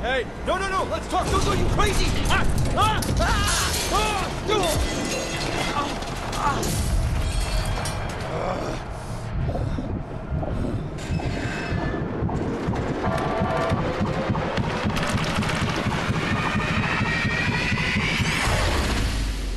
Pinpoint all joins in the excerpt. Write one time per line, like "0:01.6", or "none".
none